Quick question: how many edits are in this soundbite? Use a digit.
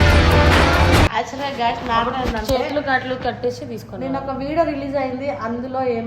1